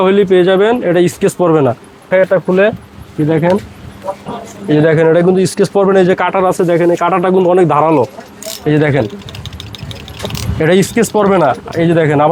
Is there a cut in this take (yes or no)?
no